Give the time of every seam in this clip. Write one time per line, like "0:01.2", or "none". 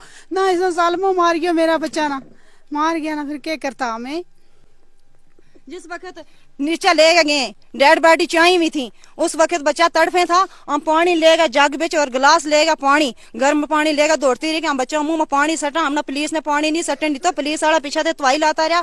none